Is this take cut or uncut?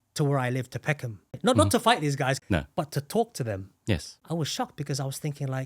cut